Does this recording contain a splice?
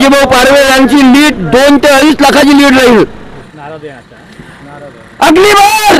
yes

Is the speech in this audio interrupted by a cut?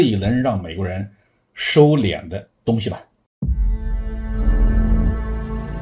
yes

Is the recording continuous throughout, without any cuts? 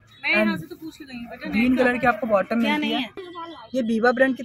no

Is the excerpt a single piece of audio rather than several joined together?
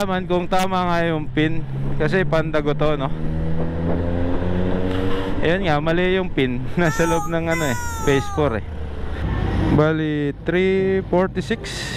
no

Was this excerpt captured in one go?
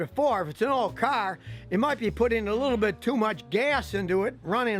yes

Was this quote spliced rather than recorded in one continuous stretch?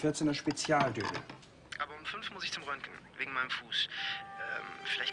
no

